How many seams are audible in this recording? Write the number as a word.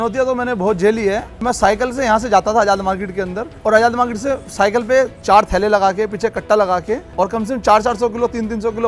four